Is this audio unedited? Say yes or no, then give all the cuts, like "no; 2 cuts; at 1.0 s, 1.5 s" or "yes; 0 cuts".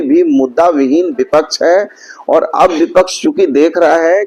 yes; 0 cuts